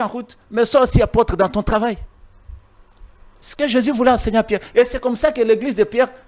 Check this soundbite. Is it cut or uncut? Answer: uncut